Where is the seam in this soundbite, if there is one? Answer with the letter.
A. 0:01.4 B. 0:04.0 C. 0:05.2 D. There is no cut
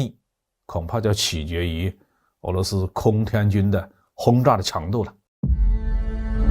C